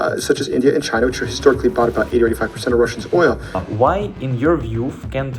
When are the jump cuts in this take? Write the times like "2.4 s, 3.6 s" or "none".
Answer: 3.6 s